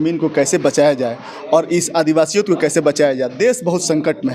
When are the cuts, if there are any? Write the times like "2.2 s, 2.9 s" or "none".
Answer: none

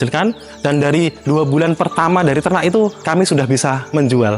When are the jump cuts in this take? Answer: none

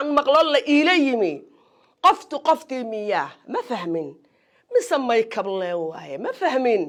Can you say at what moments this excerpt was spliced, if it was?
none

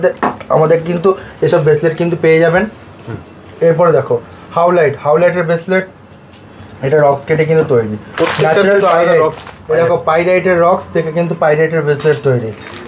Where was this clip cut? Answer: none

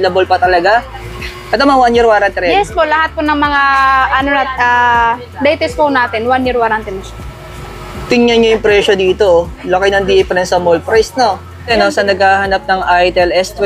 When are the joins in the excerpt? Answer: 1.0 s, 11.7 s

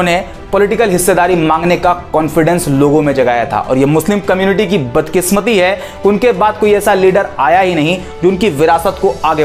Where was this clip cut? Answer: none

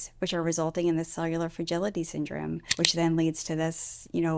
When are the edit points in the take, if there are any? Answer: 2.7 s

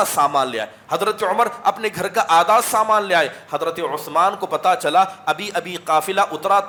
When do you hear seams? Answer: none

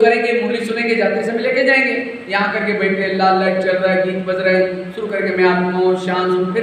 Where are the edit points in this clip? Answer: none

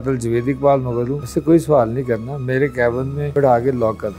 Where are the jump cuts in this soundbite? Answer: 1.3 s, 3.3 s

